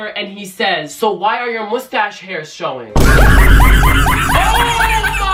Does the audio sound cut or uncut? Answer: uncut